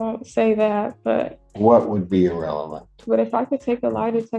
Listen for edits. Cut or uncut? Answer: cut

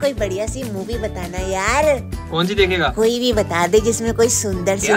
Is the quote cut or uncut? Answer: uncut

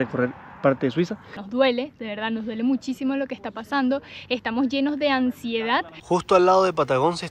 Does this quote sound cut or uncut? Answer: cut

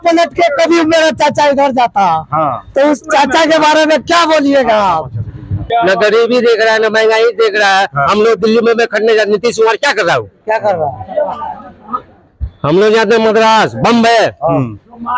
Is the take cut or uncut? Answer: cut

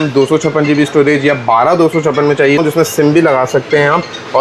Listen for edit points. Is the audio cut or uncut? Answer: cut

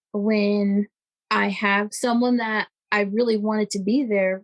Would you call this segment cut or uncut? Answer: cut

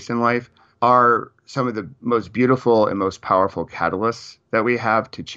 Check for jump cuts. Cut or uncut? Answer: uncut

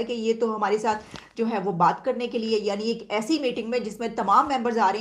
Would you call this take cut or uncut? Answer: uncut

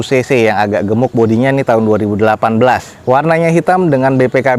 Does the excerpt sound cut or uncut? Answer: uncut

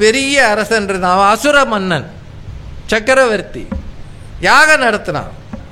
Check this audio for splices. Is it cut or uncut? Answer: uncut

